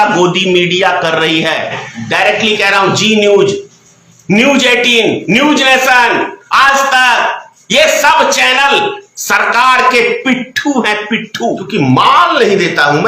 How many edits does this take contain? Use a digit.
2